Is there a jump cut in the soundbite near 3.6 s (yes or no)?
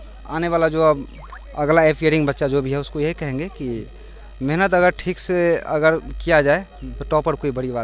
no